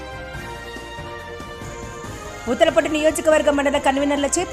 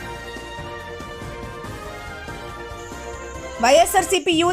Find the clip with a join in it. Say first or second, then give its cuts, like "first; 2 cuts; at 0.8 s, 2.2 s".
second; 1 cut; at 2.0 s